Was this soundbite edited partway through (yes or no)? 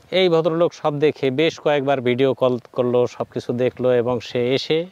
no